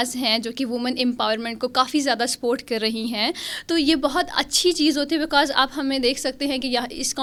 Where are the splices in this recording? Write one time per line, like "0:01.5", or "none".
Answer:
none